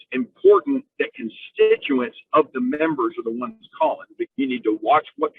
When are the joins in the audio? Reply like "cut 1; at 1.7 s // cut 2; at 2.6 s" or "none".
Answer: cut 1; at 4.2 s